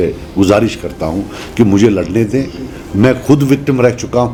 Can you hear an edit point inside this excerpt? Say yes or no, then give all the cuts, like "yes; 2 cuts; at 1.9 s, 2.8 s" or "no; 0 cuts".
no; 0 cuts